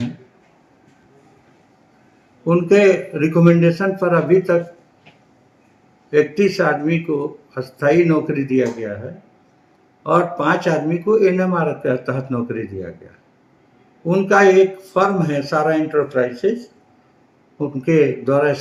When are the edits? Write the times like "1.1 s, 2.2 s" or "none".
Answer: none